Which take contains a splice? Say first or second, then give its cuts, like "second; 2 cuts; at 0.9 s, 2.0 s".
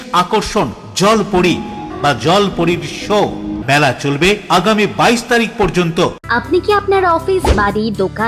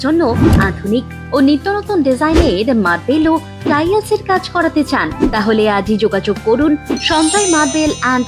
first; 3 cuts; at 1.9 s, 3.6 s, 6.2 s